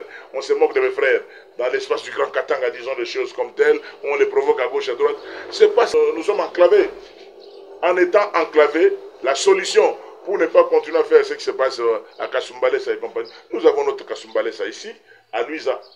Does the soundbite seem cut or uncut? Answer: cut